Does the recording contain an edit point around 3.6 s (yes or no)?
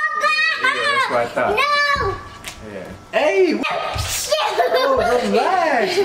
yes